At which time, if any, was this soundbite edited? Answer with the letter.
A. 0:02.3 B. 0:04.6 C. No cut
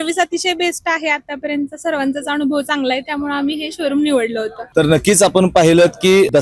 C